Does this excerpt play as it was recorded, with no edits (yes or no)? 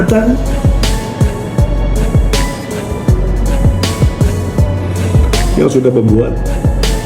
yes